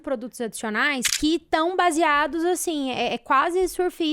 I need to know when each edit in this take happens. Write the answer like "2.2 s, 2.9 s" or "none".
1.1 s